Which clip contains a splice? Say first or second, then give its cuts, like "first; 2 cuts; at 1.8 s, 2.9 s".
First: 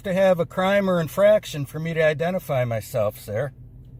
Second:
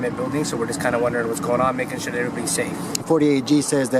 second; 1 cut; at 3.0 s